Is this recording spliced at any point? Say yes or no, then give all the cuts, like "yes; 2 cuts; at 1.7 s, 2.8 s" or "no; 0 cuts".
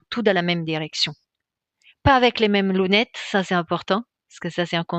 no; 0 cuts